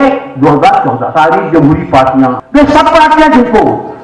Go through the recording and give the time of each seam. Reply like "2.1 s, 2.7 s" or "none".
1.0 s, 2.4 s